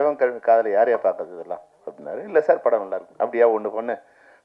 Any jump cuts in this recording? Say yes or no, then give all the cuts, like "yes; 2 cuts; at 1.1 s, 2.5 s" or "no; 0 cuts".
no; 0 cuts